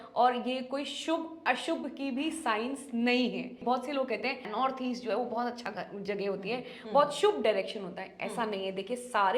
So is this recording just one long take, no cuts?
no; 2 cuts; at 3.6 s, 4.5 s

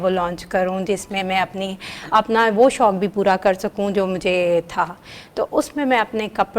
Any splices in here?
no; 0 cuts

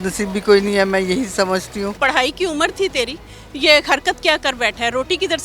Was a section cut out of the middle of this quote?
yes; 1 cut; at 1.9 s

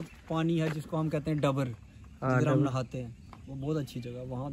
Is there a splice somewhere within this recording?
no; 0 cuts

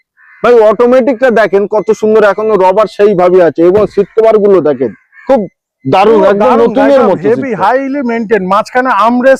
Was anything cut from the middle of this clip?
no; 0 cuts

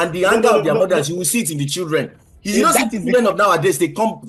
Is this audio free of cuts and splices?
yes; 0 cuts

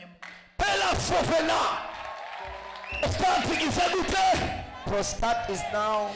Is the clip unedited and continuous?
no; 1 cut; at 3.0 s

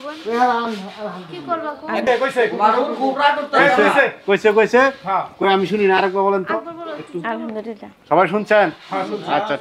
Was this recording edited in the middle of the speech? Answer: yes; 1 cut; at 2.1 s

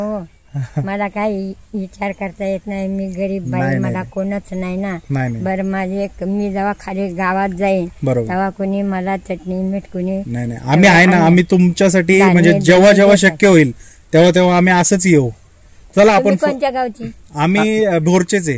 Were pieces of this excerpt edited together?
no; 0 cuts

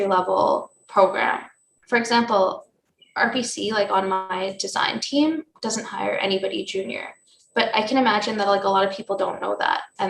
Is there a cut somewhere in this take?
yes; 1 cut; at 1.8 s

